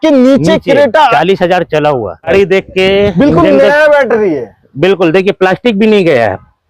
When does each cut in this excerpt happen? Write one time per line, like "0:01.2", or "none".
0:02.3